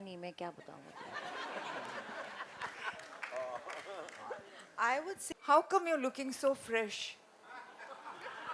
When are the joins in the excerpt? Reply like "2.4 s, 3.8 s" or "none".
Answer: 5.4 s